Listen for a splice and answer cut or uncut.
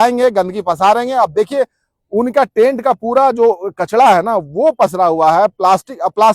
uncut